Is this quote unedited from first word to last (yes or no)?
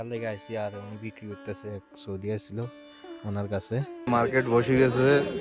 no